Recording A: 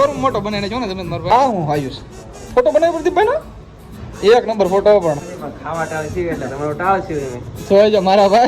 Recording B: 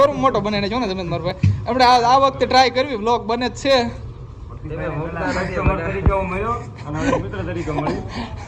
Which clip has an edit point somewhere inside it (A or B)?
A